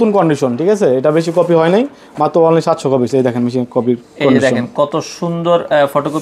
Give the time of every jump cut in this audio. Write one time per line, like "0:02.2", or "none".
none